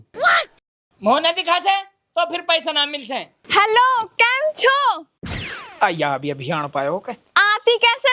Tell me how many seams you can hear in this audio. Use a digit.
1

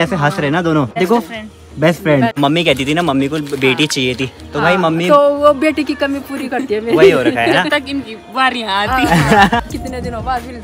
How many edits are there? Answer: 3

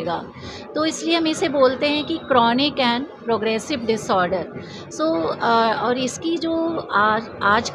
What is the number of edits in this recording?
0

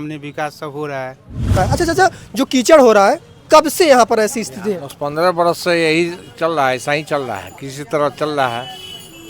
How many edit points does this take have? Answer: 1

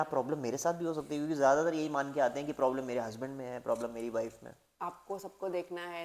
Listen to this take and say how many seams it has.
1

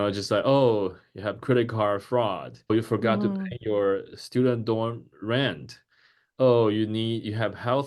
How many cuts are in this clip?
1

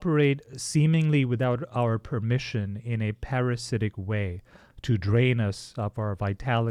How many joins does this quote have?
0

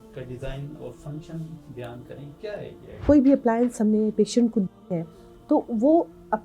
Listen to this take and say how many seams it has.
1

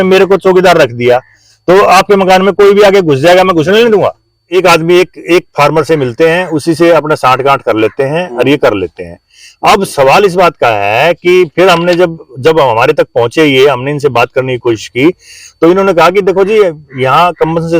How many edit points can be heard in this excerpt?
1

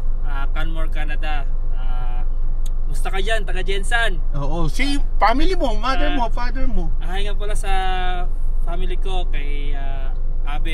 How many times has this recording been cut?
0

